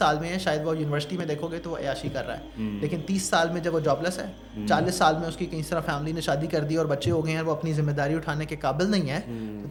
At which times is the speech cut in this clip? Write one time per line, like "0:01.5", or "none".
none